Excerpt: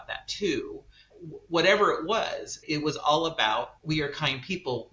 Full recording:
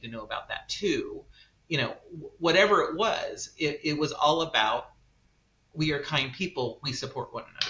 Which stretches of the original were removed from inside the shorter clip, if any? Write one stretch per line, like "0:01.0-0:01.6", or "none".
0:01.5-0:02.0
0:03.5-0:03.8
0:04.9-0:05.7